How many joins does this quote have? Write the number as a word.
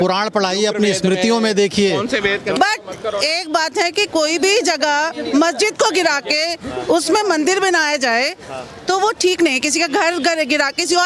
one